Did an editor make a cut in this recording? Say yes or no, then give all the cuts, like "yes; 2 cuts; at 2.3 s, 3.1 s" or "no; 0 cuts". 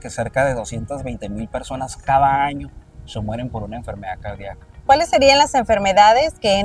yes; 1 cut; at 4.7 s